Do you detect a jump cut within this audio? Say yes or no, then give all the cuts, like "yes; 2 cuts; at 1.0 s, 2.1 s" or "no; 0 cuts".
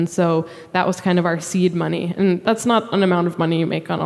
yes; 1 cut; at 2.4 s